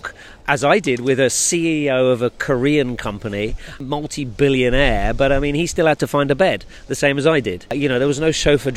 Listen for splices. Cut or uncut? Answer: cut